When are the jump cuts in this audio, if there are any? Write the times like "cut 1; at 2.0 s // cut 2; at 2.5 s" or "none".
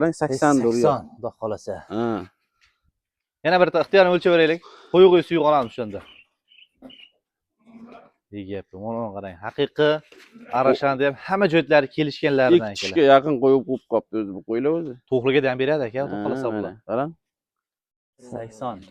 none